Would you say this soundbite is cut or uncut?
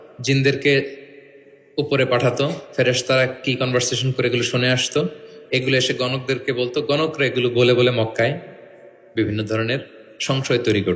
uncut